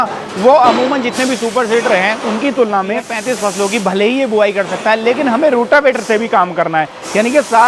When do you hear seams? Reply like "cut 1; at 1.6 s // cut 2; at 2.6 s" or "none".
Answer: cut 1; at 3.1 s

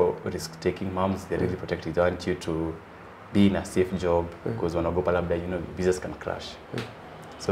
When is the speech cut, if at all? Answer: none

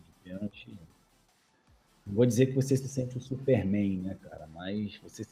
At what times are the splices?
none

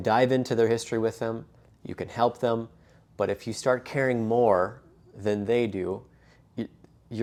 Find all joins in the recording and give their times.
none

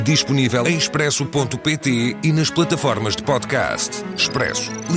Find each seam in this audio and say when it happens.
none

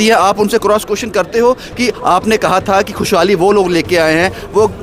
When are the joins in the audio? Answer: none

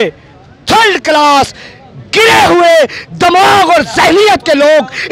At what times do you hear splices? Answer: none

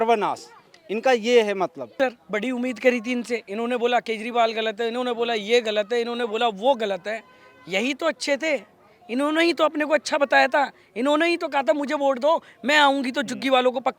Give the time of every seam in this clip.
cut 1; at 1.9 s

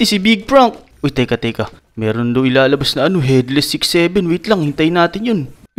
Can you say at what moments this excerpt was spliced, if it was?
cut 1; at 0.9 s

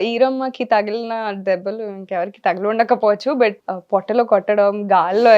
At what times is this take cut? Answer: cut 1; at 3.7 s

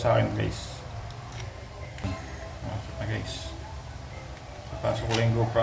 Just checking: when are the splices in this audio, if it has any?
cut 1; at 2.0 s

